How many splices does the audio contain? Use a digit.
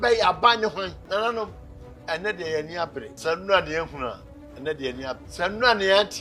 3